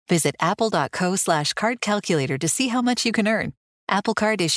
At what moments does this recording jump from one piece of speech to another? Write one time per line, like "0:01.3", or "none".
none